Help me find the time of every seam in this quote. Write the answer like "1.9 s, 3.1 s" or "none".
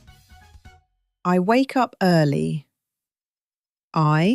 1.0 s